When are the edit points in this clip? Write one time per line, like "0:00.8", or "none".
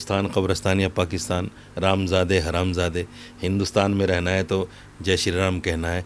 none